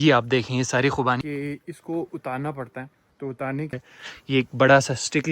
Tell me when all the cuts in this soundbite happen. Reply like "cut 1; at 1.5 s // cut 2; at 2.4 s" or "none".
cut 1; at 1.2 s // cut 2; at 3.7 s